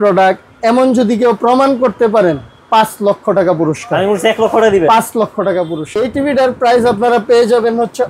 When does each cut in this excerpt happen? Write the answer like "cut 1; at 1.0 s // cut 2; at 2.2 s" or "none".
cut 1; at 5.9 s